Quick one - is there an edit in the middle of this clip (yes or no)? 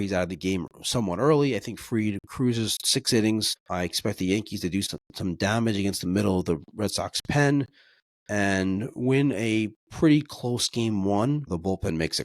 yes